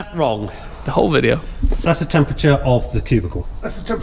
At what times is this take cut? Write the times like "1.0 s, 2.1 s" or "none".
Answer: none